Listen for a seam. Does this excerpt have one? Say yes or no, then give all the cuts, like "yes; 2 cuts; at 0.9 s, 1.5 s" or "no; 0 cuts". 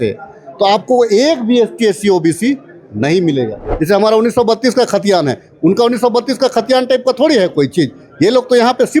yes; 1 cut; at 3.7 s